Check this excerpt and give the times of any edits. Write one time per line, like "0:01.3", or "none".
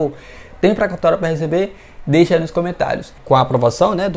0:03.2